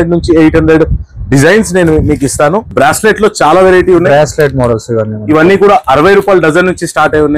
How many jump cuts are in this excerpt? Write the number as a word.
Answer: one